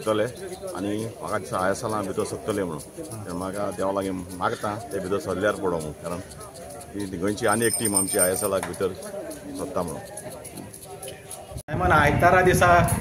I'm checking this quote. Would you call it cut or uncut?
cut